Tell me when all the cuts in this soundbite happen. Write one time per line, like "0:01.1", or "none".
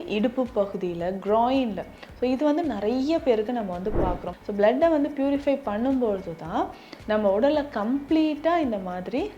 0:04.3